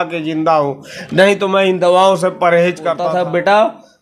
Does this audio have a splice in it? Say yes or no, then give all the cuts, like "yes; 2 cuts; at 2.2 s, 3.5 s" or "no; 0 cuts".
yes; 1 cut; at 3.0 s